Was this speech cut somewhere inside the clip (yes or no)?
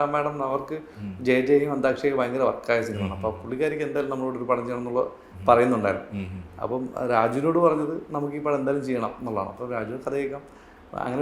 no